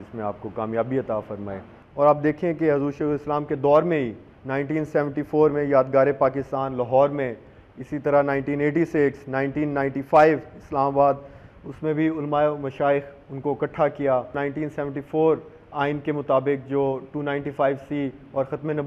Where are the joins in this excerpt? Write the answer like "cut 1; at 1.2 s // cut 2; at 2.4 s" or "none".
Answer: cut 1; at 1.8 s // cut 2; at 14.4 s